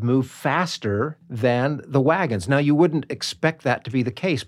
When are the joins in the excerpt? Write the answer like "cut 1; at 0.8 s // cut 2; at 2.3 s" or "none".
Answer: cut 1; at 1.2 s